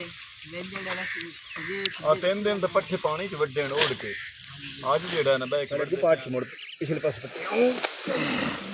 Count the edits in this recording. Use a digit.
1